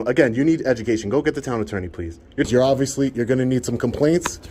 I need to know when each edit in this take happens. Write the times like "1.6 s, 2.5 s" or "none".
2.5 s